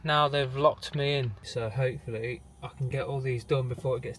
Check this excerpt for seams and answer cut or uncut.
cut